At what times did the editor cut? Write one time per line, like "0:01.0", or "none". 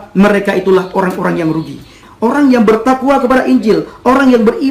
0:02.0